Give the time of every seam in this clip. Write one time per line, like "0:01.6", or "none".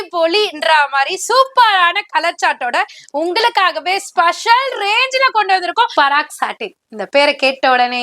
0:05.9